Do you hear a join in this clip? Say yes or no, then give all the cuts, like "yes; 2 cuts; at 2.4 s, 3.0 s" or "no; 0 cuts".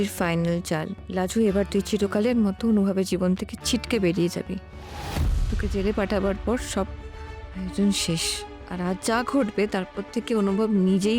yes; 1 cut; at 1.0 s